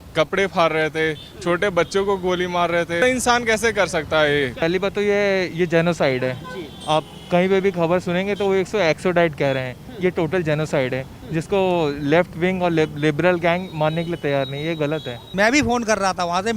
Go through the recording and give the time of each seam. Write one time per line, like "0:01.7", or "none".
0:03.0
0:04.6
0:15.3